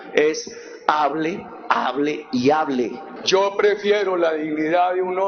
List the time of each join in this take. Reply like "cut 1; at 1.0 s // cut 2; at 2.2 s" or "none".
cut 1; at 3.1 s